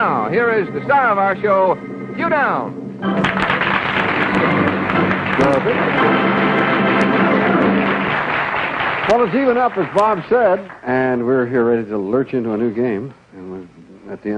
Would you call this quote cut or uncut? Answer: uncut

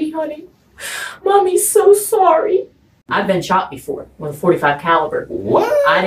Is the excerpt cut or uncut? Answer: cut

